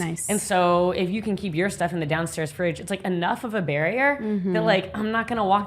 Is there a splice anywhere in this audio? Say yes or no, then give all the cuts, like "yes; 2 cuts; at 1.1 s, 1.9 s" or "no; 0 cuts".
no; 0 cuts